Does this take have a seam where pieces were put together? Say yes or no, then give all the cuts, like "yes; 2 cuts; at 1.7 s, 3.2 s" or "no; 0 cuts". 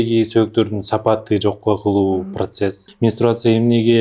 yes; 1 cut; at 2.8 s